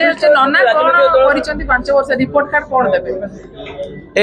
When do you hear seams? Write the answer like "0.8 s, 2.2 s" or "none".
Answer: none